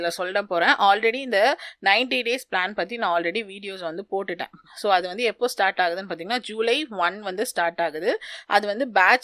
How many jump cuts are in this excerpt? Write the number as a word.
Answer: zero